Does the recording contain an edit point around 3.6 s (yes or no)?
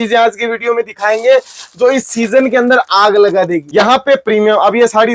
yes